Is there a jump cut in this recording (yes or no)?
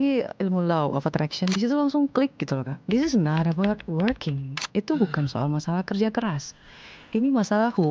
yes